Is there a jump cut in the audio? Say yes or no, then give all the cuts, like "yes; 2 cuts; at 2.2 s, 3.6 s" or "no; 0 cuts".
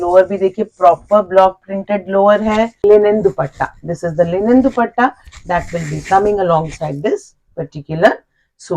yes; 1 cut; at 2.8 s